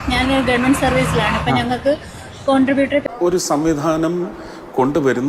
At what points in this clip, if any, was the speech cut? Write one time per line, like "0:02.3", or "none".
0:03.0